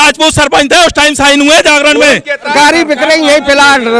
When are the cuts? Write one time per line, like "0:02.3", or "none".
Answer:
0:02.5